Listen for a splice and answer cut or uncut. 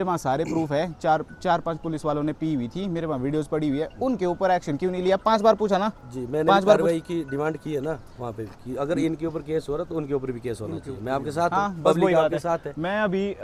uncut